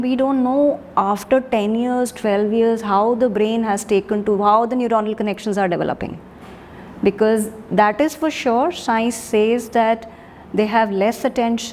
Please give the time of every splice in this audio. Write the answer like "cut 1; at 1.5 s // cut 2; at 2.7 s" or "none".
none